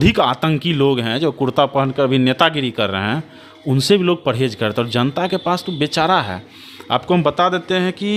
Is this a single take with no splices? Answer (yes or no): yes